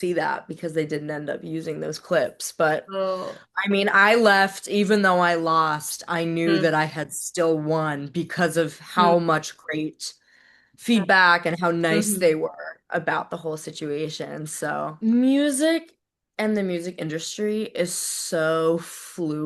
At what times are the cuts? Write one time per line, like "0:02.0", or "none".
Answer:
0:14.9